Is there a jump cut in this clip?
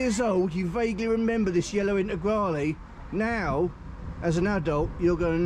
no; 0 cuts

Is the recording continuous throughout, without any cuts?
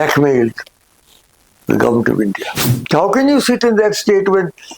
no; 1 cut; at 2.7 s

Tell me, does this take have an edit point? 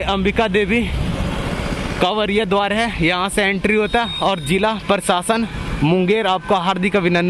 no; 0 cuts

